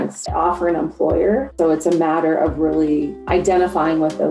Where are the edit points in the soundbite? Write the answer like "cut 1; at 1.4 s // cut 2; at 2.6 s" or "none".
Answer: cut 1; at 1.5 s // cut 2; at 3.2 s